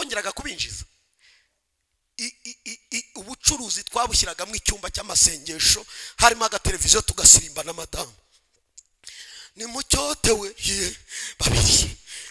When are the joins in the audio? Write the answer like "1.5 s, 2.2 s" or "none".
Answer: none